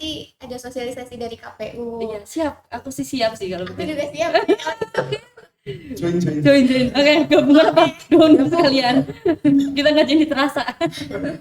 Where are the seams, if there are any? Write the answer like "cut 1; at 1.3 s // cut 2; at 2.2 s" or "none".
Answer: none